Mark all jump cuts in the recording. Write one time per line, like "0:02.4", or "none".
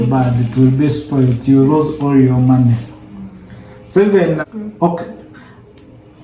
0:04.4